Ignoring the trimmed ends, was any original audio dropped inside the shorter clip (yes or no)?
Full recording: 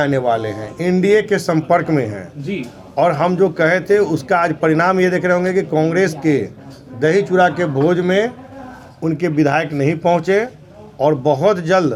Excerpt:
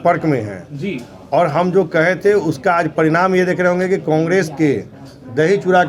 no